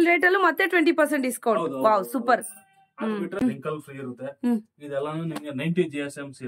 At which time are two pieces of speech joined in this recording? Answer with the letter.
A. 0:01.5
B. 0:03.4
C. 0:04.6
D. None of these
B